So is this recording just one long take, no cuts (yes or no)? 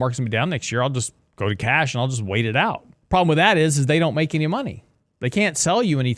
no